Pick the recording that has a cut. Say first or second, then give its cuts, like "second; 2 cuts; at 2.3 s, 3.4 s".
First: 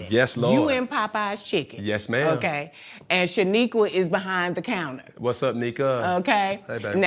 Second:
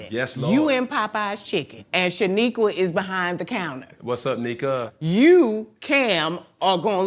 second; 2 cuts; at 1.8 s, 4.8 s